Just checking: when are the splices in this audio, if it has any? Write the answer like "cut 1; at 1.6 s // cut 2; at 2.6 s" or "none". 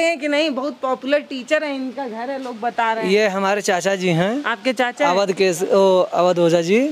none